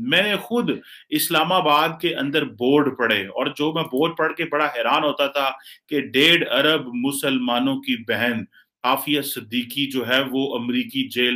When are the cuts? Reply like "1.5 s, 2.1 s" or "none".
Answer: none